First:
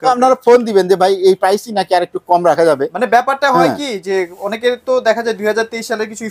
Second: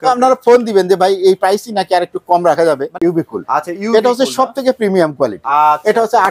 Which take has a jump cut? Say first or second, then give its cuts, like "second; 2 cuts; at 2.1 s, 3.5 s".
second; 1 cut; at 2.9 s